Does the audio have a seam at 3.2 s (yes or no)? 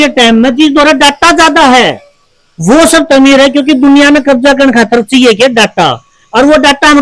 no